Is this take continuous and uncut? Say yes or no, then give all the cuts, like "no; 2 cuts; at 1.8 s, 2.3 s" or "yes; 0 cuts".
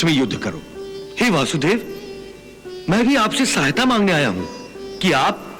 yes; 0 cuts